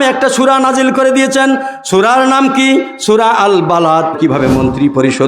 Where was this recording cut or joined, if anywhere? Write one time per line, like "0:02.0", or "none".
0:04.2